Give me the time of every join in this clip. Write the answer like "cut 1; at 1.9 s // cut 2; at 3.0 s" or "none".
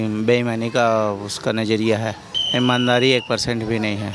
cut 1; at 2.3 s